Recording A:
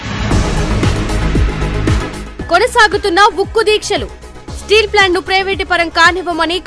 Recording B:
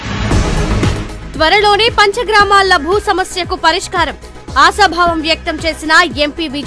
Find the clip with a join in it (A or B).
B